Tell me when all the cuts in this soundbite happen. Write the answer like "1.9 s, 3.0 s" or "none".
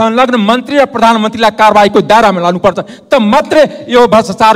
none